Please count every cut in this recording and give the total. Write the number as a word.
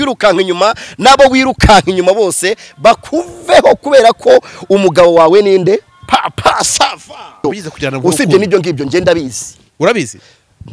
one